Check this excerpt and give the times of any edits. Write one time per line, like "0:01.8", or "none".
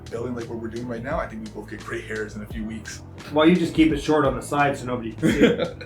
0:03.2